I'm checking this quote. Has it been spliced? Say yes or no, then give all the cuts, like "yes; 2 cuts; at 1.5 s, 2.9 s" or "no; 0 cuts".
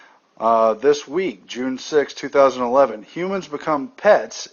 yes; 1 cut; at 1.4 s